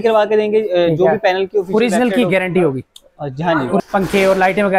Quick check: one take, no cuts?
no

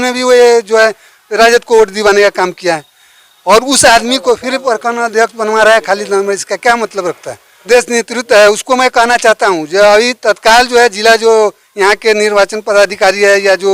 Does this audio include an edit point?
no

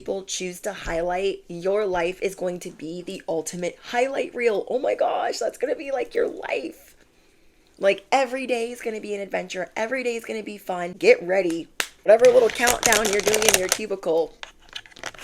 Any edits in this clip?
yes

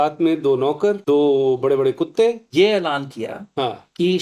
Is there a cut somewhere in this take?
yes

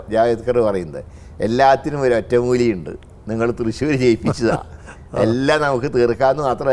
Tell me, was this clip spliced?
no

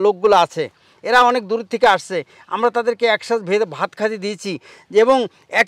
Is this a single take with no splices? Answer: yes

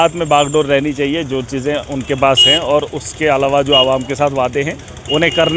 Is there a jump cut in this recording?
no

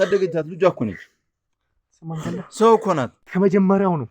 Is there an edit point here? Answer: yes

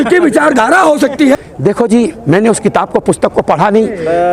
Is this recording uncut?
no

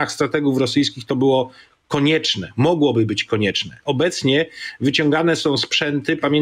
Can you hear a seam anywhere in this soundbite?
no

